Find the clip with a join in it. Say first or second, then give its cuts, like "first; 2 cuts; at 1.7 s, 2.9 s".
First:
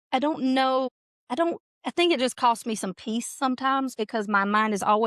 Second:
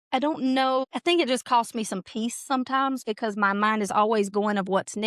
second; 1 cut; at 0.9 s